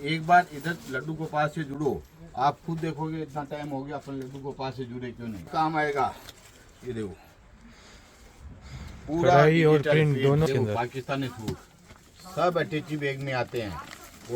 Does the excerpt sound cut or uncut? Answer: cut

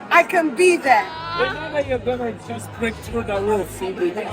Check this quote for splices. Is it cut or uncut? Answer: cut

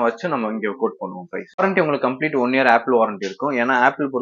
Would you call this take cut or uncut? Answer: cut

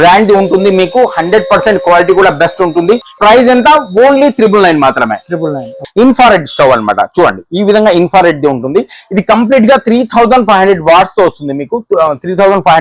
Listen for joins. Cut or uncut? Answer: cut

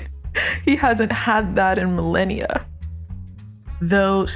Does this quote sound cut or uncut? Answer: cut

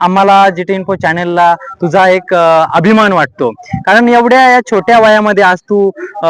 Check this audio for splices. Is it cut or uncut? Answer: uncut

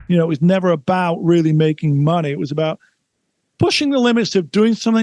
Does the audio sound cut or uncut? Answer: uncut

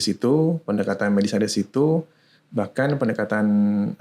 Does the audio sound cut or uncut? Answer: uncut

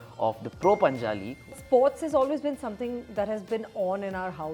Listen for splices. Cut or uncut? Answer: cut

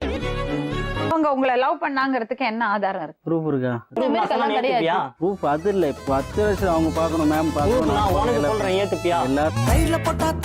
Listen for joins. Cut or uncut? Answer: cut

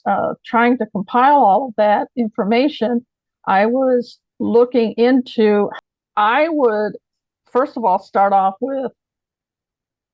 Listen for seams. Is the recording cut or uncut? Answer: cut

